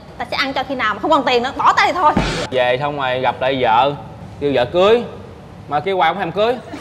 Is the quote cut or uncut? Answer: cut